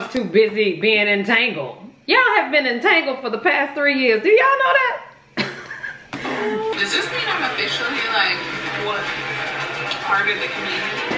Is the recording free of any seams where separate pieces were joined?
no; 1 cut; at 6.7 s

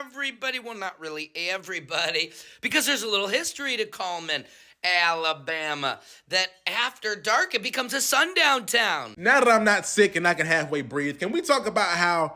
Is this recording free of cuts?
no; 1 cut; at 9.1 s

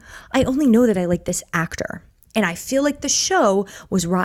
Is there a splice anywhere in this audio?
no; 0 cuts

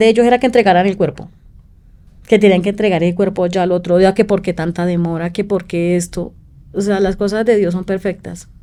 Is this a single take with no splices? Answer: yes; 0 cuts

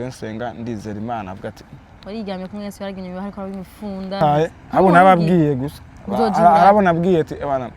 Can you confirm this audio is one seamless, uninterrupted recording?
no; 1 cut; at 4.2 s

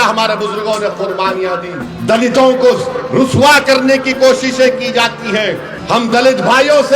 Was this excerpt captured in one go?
no; 2 cuts; at 1.9 s, 5.7 s

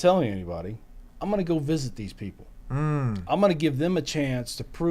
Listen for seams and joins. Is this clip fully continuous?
yes; 0 cuts

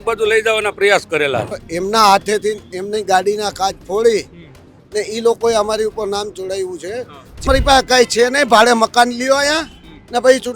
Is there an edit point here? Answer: yes; 2 cuts; at 1.6 s, 7.4 s

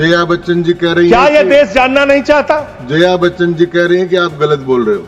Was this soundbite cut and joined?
no; 0 cuts

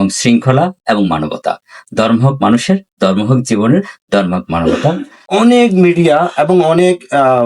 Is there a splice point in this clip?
yes; 1 cut; at 5.2 s

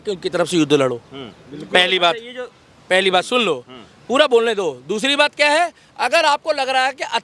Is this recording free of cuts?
yes; 0 cuts

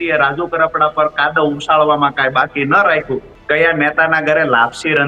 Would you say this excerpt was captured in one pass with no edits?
no; 1 cut; at 3.3 s

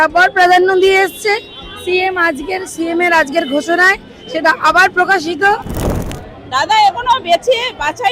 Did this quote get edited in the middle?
yes; 1 cut; at 5.9 s

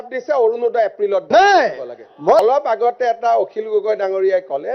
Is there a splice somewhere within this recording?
yes; 1 cut; at 2.4 s

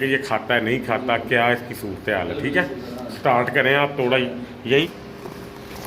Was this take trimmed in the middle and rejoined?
yes; 1 cut; at 4.8 s

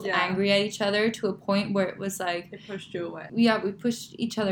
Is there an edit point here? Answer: yes; 1 cut; at 3.3 s

